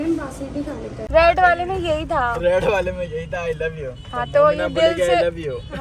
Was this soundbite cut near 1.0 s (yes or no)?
yes